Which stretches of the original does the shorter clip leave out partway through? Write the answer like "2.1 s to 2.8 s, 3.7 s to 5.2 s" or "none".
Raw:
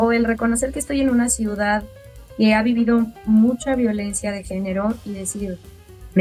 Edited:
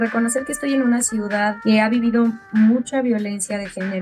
1.8 s to 2.3 s